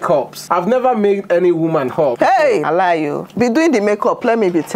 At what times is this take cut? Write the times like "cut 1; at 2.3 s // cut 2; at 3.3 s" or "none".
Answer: cut 1; at 3.3 s

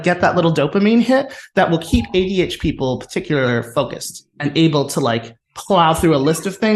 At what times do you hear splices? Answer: none

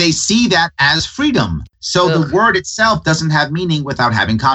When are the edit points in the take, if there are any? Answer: none

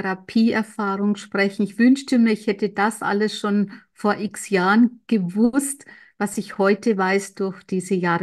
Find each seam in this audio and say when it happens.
none

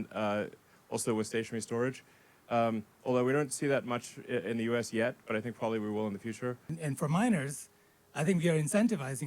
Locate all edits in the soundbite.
cut 1; at 6.6 s

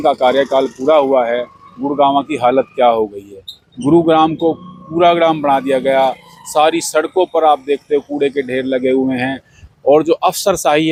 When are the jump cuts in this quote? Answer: none

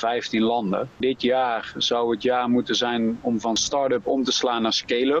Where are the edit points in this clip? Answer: cut 1; at 1.0 s // cut 2; at 3.6 s

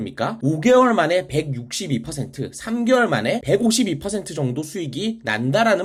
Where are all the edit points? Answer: none

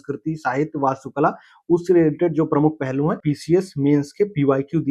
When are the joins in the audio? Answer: cut 1; at 3.2 s

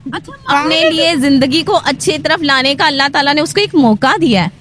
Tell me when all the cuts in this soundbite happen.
cut 1; at 0.9 s

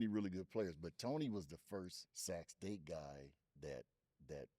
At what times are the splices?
cut 1; at 2.1 s

